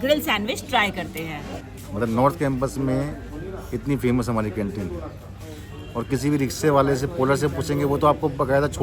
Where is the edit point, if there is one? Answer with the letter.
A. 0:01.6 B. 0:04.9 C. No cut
A